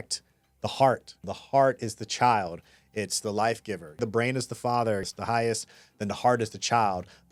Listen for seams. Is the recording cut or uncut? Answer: uncut